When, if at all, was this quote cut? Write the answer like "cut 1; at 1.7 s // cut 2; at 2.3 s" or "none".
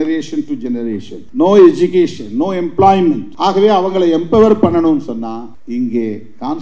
cut 1; at 1.2 s // cut 2; at 3.3 s // cut 3; at 5.5 s